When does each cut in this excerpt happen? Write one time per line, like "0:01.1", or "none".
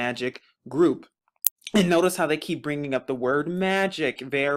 none